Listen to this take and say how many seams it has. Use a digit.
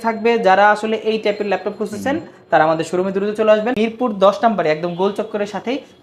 1